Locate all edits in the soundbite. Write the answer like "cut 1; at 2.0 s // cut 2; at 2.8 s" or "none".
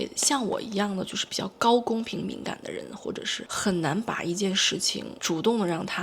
cut 1; at 3.4 s